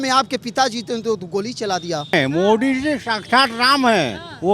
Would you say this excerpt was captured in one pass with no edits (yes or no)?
no